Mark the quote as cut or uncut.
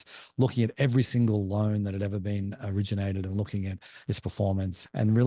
uncut